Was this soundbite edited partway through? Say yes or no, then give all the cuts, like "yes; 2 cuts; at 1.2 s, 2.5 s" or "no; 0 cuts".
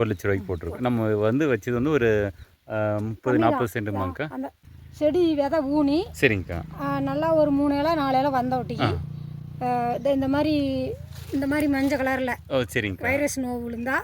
yes; 1 cut; at 4.6 s